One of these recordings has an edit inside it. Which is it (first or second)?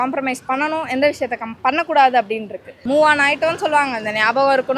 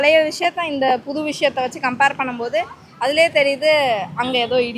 first